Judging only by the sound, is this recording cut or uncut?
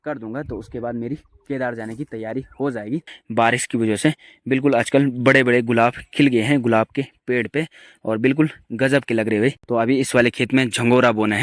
cut